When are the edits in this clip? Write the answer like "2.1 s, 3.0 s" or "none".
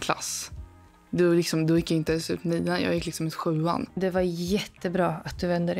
4.0 s